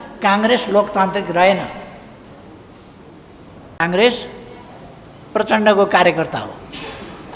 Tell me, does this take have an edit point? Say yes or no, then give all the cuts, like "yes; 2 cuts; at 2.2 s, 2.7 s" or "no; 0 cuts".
no; 0 cuts